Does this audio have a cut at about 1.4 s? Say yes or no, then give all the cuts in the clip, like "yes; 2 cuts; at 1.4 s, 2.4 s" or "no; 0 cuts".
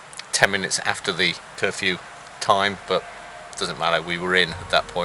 yes; 1 cut; at 1.4 s